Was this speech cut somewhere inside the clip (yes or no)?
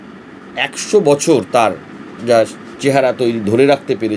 no